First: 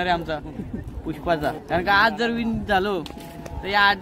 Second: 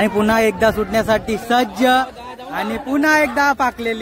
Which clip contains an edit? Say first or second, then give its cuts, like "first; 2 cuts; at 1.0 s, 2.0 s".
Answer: first; 1 cut; at 1.6 s